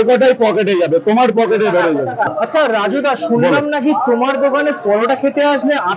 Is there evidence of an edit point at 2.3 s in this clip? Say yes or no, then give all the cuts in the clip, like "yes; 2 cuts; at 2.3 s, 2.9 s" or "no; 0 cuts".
yes; 1 cut; at 2.3 s